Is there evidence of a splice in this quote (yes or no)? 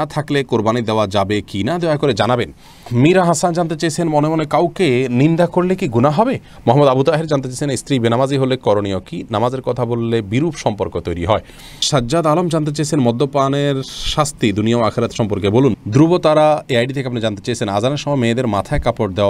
yes